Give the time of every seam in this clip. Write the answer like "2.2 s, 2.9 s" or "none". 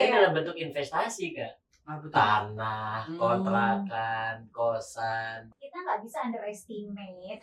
5.4 s